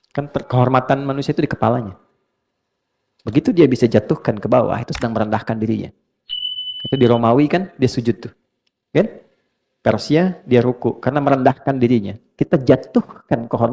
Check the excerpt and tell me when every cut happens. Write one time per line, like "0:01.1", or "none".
none